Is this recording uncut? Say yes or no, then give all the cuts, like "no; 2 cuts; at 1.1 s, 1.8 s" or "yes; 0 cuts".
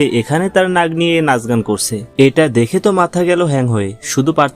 no; 1 cut; at 2.0 s